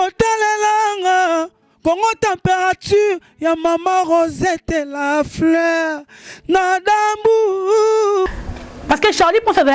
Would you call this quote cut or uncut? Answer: cut